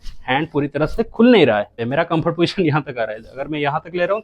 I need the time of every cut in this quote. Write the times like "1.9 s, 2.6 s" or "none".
1.8 s